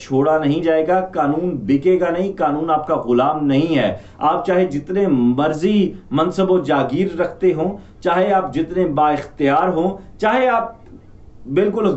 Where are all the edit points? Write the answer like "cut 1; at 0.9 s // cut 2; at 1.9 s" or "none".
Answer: none